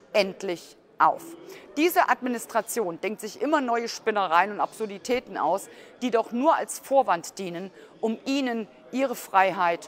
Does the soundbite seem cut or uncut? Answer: uncut